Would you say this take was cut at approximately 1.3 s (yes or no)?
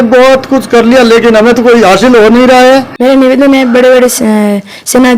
no